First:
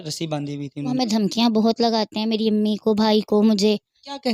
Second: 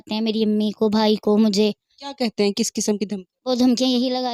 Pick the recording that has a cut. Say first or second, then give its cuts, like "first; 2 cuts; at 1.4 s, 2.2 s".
first; 1 cut; at 0.9 s